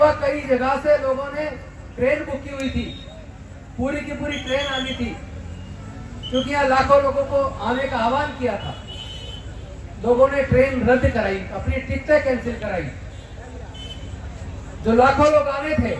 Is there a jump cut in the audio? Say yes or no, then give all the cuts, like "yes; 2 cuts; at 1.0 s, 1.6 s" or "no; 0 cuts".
no; 0 cuts